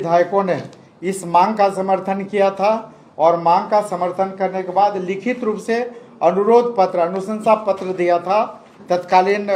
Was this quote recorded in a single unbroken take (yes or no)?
yes